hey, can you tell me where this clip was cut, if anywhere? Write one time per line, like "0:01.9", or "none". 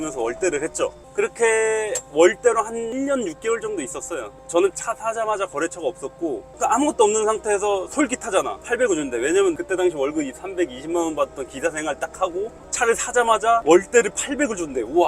0:02.0
0:02.9
0:04.4
0:09.5